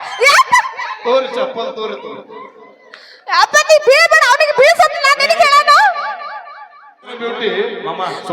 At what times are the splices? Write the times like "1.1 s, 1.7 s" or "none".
7.2 s